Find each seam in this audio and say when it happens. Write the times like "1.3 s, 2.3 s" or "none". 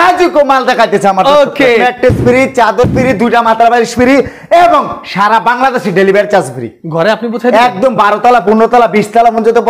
1.8 s